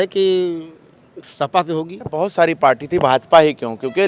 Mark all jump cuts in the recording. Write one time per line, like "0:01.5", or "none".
0:02.2